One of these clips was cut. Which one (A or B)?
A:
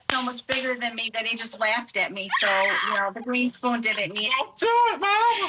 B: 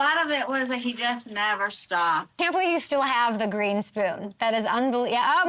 B